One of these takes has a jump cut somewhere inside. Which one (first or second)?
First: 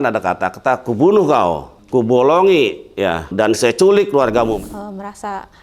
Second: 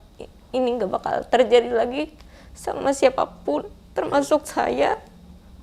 first